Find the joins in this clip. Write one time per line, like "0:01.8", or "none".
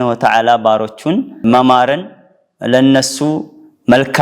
0:01.4